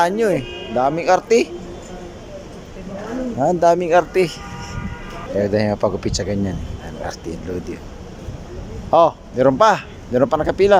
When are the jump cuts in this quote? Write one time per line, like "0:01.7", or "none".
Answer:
0:01.0